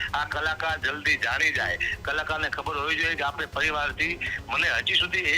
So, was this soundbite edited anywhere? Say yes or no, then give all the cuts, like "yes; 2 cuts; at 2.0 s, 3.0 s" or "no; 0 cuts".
no; 0 cuts